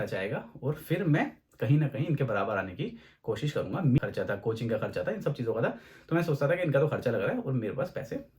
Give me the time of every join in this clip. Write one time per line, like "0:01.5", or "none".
0:03.9